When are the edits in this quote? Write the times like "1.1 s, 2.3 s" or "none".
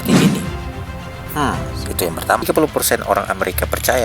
2.5 s